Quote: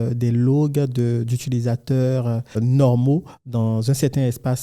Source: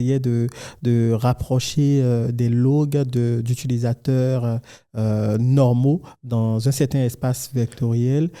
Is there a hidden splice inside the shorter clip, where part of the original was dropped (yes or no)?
yes